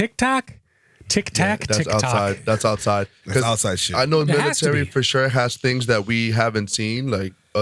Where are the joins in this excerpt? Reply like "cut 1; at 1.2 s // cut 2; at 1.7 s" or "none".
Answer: none